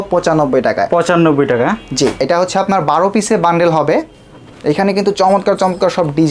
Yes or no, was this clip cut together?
yes